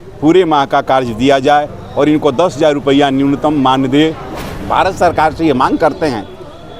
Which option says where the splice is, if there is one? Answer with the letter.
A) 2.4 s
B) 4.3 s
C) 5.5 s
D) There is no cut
B